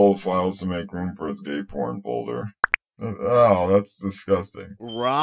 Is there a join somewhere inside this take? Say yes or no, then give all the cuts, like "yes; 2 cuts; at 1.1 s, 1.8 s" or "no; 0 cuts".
no; 0 cuts